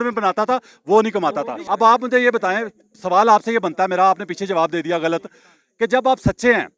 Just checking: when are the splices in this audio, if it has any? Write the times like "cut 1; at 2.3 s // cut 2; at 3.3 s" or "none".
cut 1; at 1.6 s